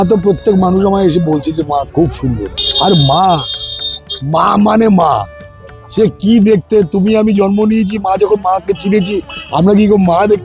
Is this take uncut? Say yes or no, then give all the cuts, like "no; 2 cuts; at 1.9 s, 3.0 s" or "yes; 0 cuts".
yes; 0 cuts